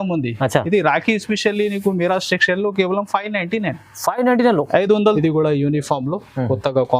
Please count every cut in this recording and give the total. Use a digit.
1